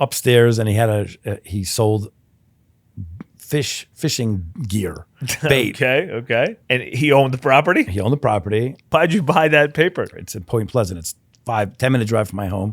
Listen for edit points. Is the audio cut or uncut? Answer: cut